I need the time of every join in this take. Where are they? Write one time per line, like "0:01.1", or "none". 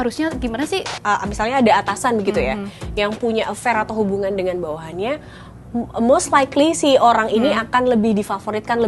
0:00.9